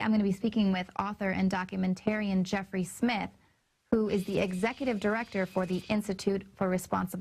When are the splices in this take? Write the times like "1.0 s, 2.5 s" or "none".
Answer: 4.8 s